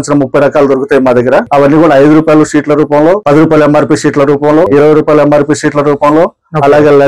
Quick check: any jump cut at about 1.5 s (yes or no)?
yes